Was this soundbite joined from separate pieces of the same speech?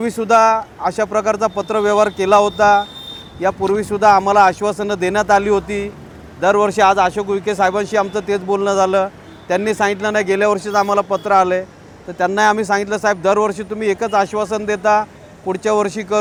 no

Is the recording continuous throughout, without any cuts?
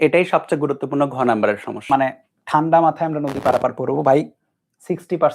no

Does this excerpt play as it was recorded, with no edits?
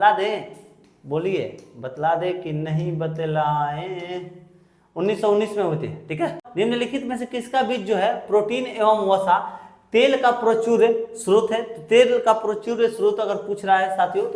no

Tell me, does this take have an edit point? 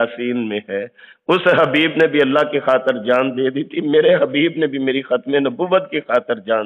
no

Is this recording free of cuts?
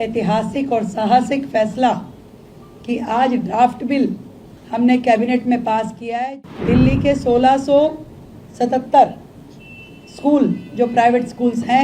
no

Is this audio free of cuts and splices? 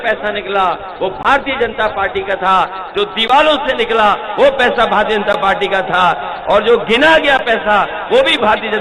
yes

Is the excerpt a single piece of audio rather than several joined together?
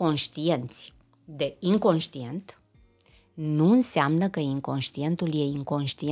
yes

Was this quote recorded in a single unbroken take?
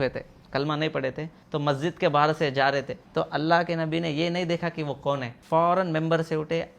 no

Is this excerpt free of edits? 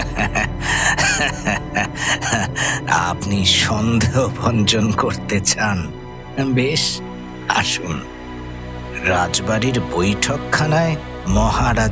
yes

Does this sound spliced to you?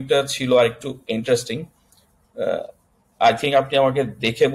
no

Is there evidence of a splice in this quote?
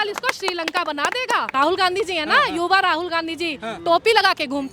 yes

